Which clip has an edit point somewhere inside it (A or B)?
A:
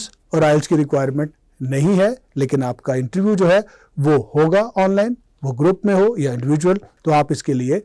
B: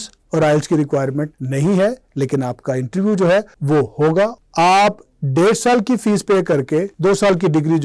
B